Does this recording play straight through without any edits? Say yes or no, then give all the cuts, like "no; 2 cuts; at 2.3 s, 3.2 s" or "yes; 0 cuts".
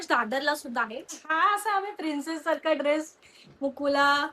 no; 1 cut; at 1.2 s